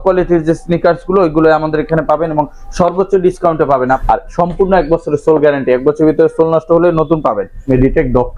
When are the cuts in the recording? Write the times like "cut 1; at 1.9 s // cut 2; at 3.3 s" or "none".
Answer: cut 1; at 4.0 s // cut 2; at 7.6 s